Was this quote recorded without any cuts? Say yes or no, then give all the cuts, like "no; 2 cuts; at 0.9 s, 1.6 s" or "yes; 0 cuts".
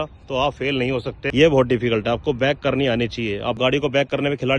no; 1 cut; at 1.2 s